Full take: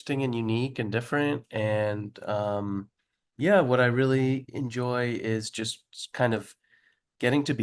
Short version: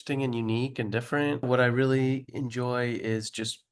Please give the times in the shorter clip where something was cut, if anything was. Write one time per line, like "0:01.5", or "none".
0:01.5